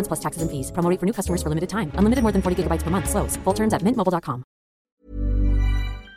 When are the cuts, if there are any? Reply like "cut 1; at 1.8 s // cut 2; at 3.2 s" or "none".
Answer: cut 1; at 5.0 s